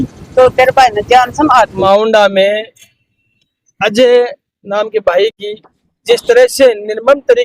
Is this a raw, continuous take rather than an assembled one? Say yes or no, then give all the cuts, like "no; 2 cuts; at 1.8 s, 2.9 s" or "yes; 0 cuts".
no; 1 cut; at 1.8 s